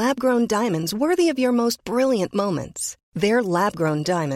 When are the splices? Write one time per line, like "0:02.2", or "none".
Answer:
none